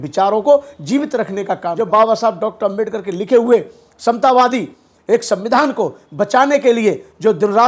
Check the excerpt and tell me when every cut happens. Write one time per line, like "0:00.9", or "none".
0:01.7